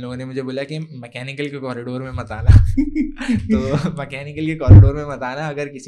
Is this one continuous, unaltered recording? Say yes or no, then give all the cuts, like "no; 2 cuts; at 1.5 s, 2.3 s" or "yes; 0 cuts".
yes; 0 cuts